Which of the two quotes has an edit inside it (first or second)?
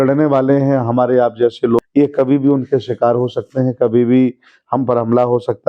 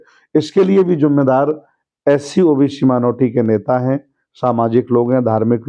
first